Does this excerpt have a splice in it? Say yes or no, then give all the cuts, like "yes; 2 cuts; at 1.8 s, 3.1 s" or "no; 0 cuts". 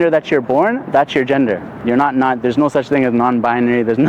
yes; 1 cut; at 1.7 s